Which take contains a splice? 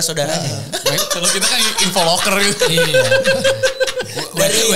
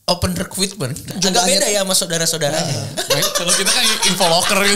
second; 1 cut; at 1.1 s

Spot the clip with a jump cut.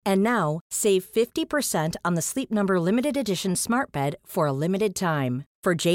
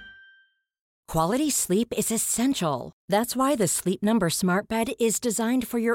second; 1 cut; at 0.9 s

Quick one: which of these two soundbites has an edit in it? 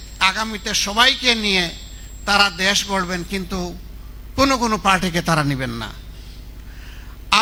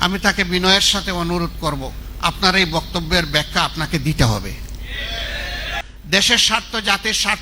second; 2 cuts; at 2.0 s, 5.8 s

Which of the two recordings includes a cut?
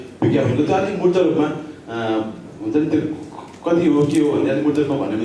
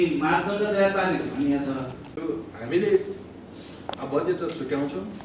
second; 1 cut; at 2.0 s

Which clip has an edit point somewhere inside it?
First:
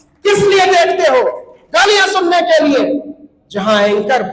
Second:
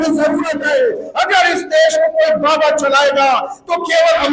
second; 1 cut; at 1.1 s

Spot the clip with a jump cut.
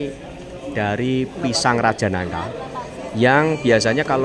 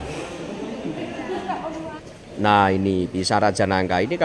second; 1 cut; at 2.0 s

